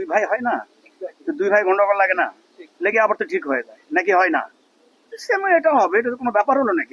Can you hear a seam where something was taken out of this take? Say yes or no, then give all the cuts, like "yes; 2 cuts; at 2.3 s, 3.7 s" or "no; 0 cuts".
no; 0 cuts